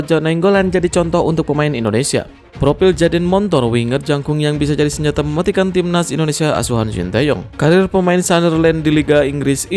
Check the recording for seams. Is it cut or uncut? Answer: cut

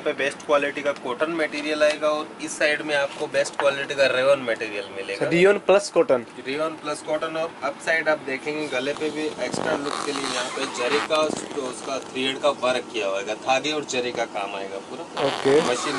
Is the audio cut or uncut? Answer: uncut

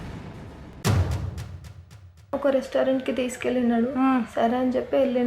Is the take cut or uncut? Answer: cut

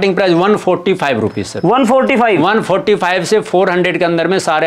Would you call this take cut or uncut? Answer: uncut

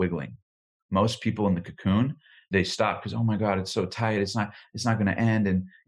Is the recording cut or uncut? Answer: cut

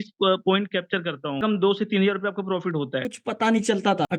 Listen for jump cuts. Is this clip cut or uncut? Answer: cut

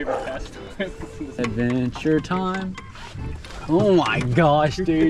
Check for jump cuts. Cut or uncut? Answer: cut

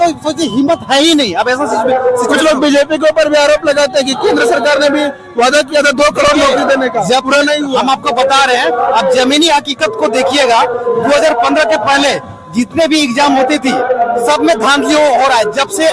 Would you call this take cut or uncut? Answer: uncut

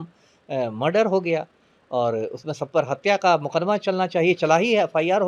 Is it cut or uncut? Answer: uncut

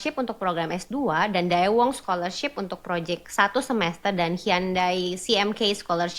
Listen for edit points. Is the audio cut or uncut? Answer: uncut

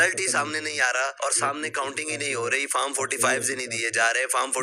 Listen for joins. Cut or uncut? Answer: cut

